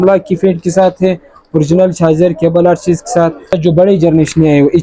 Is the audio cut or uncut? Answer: cut